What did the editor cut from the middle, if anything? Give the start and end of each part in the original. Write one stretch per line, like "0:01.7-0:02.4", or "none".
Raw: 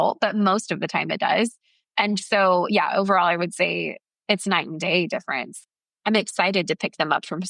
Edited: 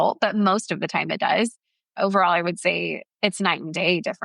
0:01.9-0:02.9
0:04.0-0:04.1

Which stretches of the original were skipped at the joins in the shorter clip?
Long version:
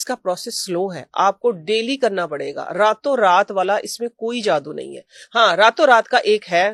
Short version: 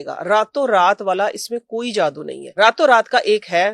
0:05.0-0:05.6

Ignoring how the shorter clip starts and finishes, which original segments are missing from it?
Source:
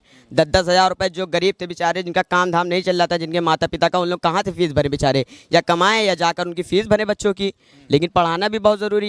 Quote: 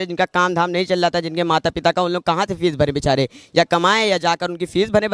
none

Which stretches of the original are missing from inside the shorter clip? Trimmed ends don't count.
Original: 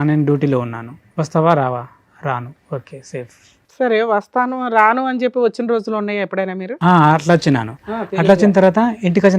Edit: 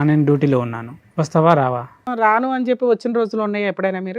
0:02.1-0:04.6

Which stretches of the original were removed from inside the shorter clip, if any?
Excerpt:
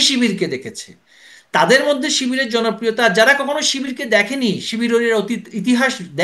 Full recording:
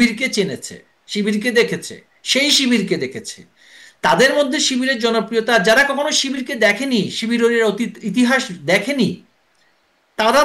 none

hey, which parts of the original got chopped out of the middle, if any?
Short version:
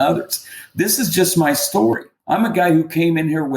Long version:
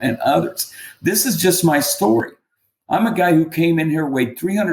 0:02.4-0:02.7

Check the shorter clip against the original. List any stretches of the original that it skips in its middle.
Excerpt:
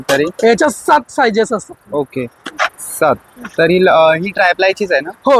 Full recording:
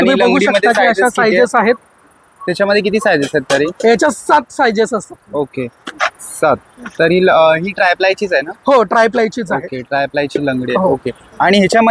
none

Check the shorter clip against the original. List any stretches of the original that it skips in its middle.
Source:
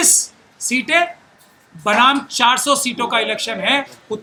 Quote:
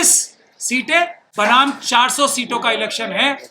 0:01.2-0:01.7

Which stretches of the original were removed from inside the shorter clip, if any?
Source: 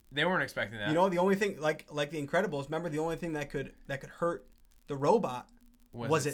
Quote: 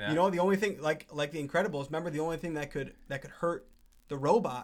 none

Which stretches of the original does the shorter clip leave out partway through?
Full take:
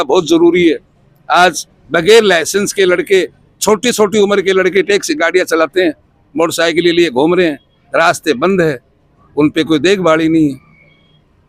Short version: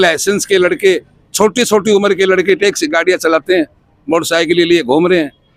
none

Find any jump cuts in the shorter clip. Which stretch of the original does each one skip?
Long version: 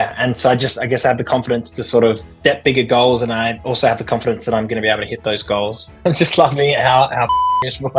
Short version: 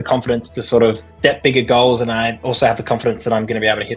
none

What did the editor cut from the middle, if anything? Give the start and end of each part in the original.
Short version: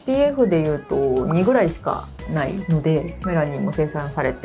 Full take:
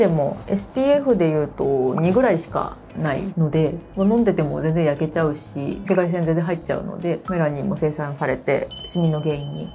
0:03.9-0:07.2

